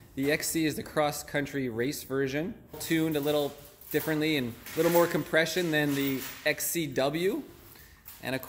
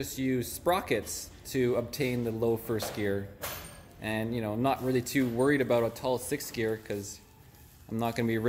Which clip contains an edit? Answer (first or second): first